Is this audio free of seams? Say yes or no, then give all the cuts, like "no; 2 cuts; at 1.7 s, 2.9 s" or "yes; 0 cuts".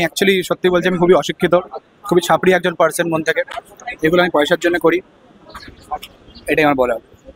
yes; 0 cuts